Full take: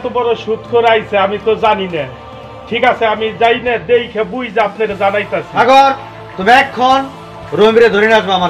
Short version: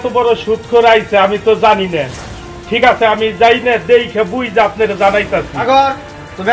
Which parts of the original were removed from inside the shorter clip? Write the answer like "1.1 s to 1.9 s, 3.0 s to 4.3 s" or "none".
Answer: none